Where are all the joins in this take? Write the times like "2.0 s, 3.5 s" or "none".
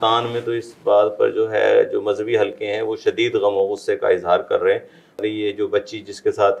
5.2 s

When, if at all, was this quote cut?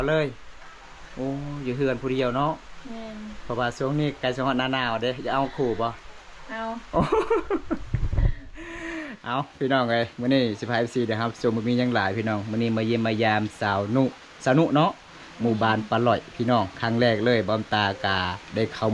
none

